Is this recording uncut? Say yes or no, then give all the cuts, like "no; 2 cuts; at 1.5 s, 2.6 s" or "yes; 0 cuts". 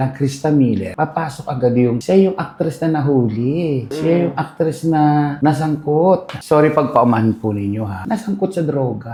yes; 0 cuts